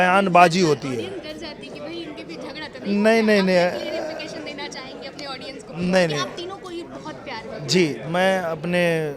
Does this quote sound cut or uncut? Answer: uncut